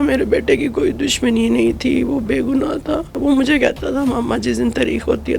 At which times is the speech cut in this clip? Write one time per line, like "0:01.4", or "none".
0:03.2